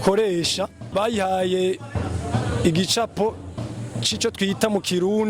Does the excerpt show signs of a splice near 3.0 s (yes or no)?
no